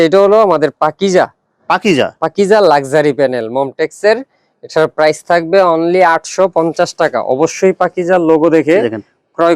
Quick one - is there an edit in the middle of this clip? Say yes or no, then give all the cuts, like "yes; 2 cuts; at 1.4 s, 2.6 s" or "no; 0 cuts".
no; 0 cuts